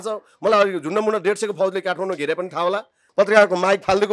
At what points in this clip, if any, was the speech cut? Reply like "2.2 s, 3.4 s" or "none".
3.0 s